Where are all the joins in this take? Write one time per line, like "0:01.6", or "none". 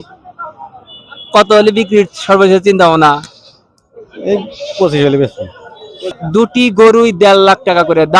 0:06.2